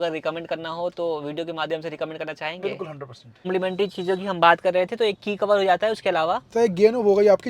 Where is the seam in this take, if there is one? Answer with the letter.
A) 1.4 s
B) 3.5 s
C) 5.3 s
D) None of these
B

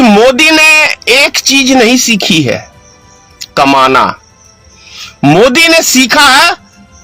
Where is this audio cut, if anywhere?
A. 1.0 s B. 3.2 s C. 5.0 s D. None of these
D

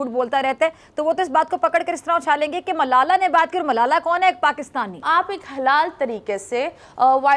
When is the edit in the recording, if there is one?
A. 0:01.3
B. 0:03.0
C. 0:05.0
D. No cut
C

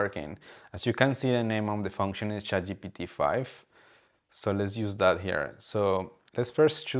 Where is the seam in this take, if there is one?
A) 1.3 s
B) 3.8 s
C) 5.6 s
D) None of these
D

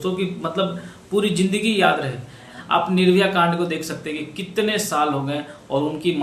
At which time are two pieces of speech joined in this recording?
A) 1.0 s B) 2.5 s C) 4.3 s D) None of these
B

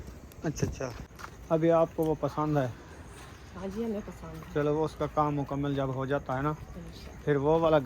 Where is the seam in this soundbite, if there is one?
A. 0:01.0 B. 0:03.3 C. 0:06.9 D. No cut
A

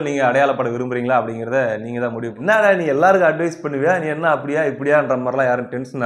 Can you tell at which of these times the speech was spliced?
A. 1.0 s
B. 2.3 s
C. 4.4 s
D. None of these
B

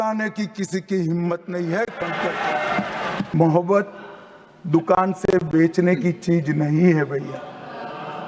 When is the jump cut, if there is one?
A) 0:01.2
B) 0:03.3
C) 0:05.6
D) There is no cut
B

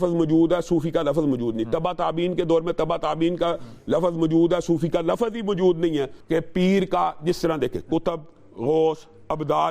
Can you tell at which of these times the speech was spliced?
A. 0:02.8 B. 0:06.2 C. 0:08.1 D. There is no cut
B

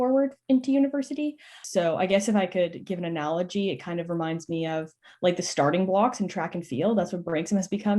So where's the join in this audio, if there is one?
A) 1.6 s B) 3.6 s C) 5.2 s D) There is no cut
A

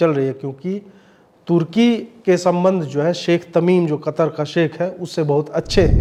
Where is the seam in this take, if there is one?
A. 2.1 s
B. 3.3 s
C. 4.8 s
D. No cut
D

